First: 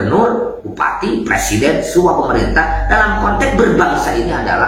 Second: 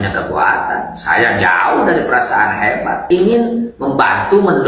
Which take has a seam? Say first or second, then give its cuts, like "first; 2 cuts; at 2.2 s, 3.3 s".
second; 1 cut; at 3.0 s